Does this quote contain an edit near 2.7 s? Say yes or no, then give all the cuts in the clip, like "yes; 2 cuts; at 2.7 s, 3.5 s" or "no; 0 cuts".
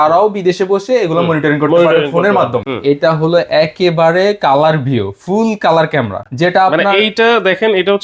yes; 2 cuts; at 2.7 s, 6.2 s